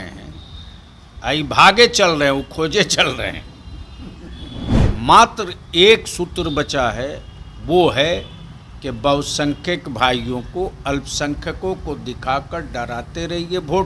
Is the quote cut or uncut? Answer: cut